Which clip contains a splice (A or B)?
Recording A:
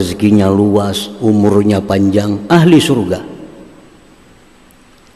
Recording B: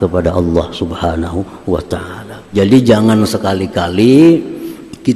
B